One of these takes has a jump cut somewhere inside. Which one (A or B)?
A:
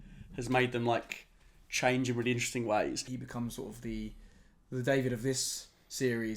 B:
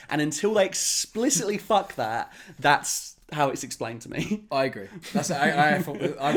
A